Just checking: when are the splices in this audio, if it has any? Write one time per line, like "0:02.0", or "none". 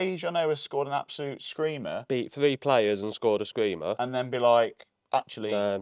none